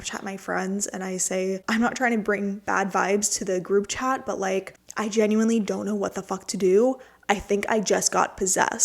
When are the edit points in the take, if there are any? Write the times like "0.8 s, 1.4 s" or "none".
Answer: 1.6 s, 4.8 s